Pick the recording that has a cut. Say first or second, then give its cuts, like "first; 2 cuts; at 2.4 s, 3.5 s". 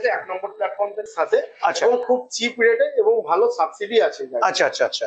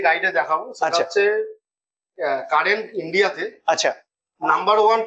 first; 1 cut; at 1.1 s